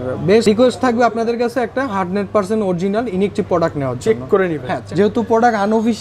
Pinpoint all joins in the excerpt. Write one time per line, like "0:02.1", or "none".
0:04.9